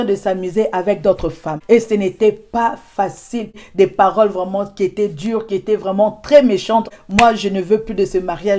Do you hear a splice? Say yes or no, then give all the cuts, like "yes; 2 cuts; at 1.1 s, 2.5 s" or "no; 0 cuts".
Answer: yes; 3 cuts; at 1.5 s, 3.3 s, 7.0 s